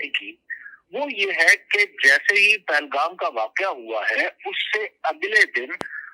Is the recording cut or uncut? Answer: uncut